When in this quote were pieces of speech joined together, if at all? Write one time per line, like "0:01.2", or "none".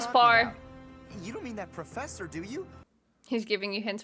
0:02.8